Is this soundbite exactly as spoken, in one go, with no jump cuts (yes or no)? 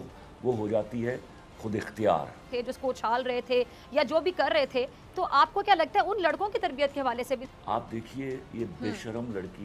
no